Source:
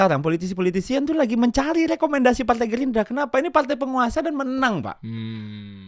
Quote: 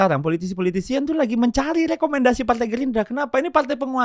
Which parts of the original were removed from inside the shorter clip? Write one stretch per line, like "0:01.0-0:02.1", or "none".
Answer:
none